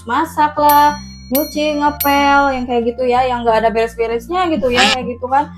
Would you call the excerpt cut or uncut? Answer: uncut